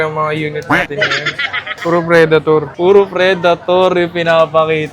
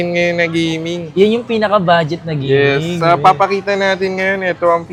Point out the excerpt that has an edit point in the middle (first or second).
first